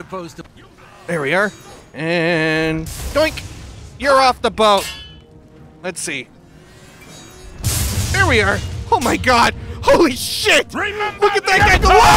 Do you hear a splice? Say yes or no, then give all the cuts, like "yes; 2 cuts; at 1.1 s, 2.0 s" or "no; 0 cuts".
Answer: yes; 1 cut; at 8.7 s